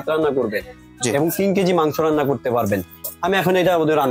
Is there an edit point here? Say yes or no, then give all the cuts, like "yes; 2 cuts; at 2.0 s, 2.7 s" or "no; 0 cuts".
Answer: yes; 1 cut; at 3.0 s